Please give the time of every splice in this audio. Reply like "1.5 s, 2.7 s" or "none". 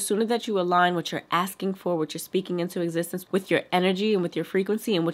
none